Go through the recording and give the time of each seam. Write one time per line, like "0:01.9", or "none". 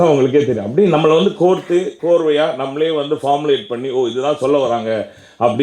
none